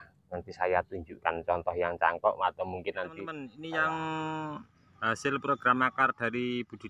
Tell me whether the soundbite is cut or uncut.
cut